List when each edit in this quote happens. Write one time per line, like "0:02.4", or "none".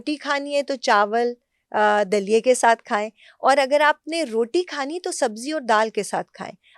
none